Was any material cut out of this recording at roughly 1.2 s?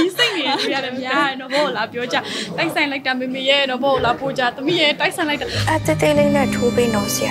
no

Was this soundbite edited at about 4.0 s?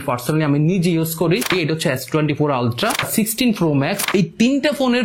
yes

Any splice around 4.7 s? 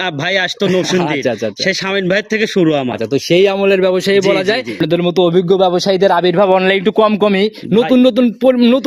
yes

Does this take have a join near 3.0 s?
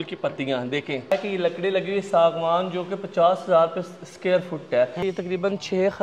no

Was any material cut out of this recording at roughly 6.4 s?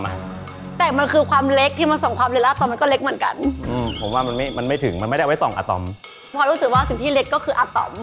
yes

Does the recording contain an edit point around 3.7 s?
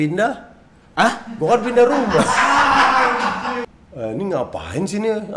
yes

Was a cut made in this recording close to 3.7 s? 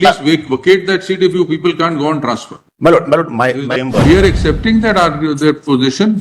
yes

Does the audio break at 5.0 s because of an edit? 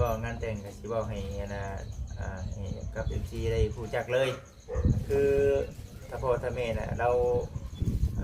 yes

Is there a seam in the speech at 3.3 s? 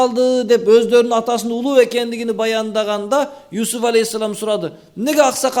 no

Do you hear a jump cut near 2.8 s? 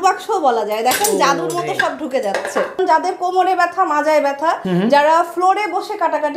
yes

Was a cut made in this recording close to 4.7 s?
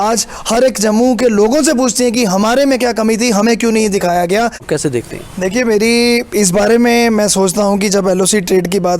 yes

